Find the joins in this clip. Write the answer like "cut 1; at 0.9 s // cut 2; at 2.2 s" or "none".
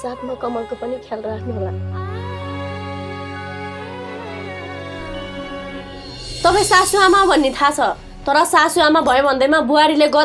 cut 1; at 6.2 s